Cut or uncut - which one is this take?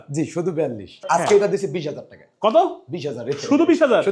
cut